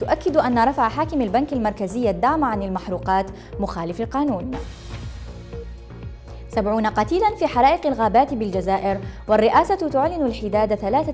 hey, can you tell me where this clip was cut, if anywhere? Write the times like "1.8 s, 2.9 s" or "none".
none